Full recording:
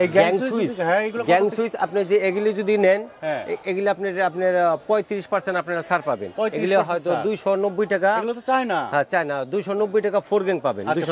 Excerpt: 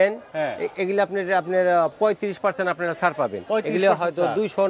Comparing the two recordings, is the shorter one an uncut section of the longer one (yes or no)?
yes